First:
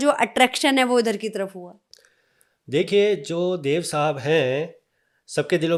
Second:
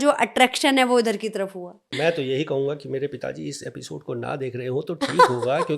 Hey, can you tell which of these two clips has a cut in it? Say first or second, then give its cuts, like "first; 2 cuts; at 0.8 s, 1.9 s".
second; 1 cut; at 1.8 s